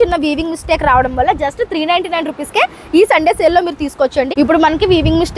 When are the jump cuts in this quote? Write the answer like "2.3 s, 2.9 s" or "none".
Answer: 4.3 s